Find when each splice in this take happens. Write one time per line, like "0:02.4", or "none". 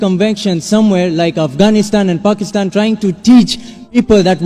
none

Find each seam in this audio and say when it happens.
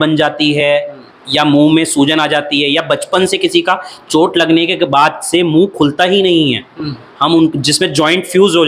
none

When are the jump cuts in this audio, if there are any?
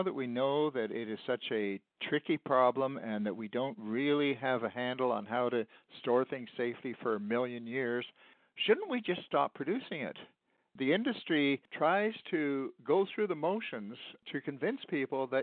0:10.7
0:11.7

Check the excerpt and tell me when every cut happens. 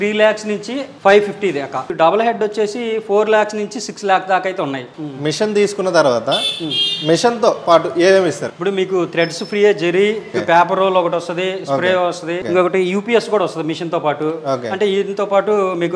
0:01.9
0:04.9
0:08.5
0:10.4
0:12.4

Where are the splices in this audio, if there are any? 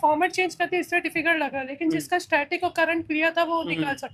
none

